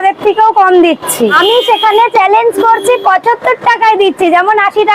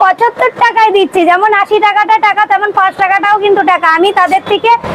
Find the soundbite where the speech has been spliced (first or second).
first